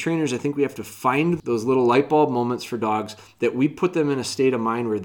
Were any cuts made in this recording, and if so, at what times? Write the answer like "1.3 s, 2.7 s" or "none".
1.4 s

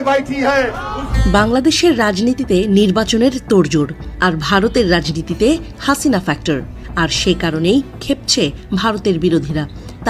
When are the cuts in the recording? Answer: 1.1 s, 6.8 s

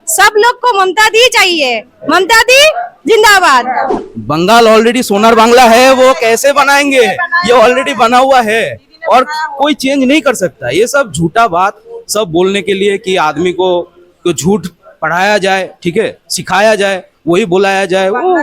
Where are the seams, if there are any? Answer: 4.1 s

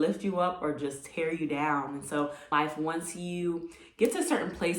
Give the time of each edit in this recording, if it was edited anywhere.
2.5 s

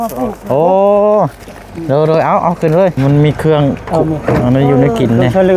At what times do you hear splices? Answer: 3.0 s

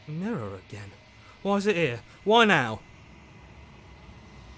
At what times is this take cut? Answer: 2.8 s

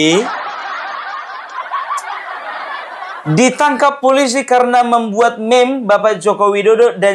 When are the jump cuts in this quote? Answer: none

